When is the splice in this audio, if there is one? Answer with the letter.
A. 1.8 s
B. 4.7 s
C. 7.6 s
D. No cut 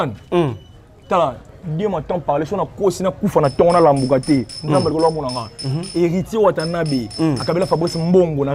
D